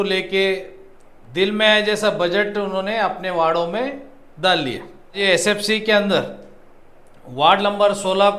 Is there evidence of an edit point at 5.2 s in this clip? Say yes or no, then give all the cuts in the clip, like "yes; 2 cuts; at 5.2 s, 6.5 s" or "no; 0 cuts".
yes; 1 cut; at 5.2 s